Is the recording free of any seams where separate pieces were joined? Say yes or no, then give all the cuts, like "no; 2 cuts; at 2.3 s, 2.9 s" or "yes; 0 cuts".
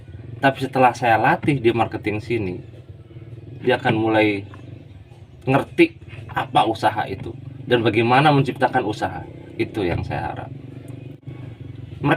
no; 1 cut; at 11.3 s